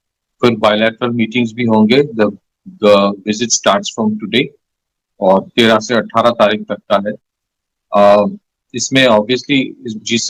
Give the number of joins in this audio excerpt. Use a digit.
0